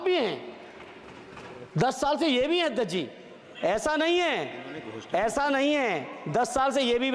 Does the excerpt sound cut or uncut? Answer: uncut